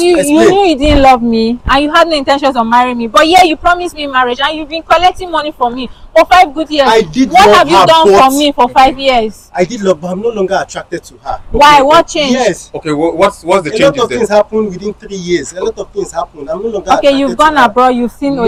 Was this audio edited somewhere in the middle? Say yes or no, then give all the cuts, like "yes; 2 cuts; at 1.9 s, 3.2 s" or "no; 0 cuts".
no; 0 cuts